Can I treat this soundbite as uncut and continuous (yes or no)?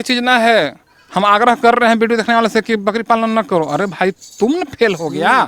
yes